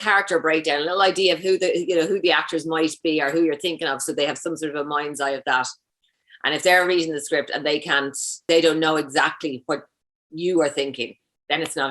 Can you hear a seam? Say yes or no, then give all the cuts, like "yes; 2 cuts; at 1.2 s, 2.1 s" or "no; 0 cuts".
yes; 1 cut; at 8.4 s